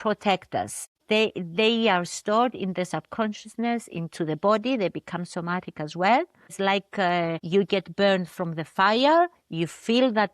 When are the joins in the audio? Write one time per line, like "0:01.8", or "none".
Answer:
0:01.0
0:06.5
0:07.4

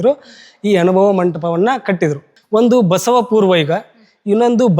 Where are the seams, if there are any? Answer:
0:02.3

